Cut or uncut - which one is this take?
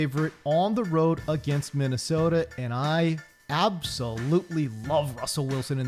uncut